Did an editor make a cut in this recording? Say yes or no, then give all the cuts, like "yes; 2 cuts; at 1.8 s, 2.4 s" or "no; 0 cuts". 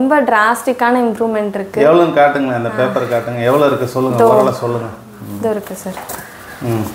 no; 0 cuts